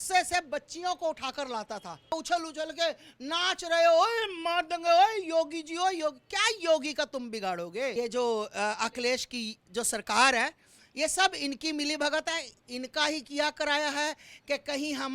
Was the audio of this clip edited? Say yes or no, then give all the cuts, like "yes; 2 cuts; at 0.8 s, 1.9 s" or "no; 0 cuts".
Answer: yes; 2 cuts; at 2.1 s, 7.9 s